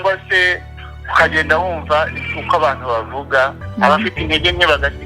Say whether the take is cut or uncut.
cut